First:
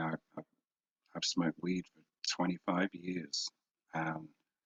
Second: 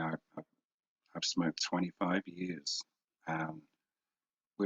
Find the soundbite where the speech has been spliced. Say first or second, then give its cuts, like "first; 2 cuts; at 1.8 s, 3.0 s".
second; 1 cut; at 1.6 s